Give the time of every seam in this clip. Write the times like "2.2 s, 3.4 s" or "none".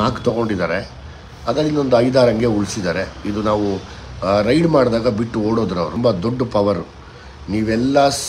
5.9 s